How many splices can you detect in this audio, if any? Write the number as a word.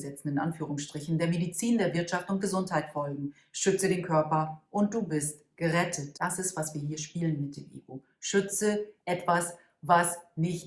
one